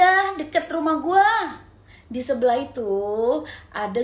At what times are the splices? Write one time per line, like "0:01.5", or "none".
none